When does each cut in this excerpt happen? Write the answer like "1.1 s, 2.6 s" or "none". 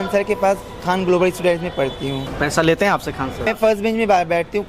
2.3 s, 3.5 s